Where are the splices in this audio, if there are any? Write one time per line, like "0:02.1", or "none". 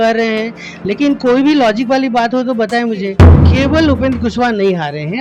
0:03.3